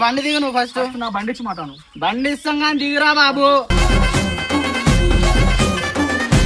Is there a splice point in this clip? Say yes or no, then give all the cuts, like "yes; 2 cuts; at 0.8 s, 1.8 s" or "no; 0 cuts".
no; 0 cuts